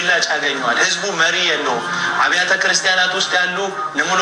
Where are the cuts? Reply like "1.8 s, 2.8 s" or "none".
none